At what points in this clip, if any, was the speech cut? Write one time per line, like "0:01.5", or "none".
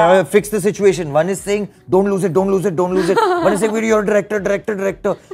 none